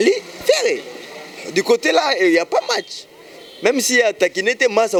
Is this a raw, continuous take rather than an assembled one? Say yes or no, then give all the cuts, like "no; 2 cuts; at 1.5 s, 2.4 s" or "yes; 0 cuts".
yes; 0 cuts